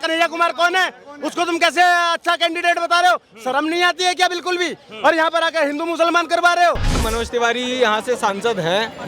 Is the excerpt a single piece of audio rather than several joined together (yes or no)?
no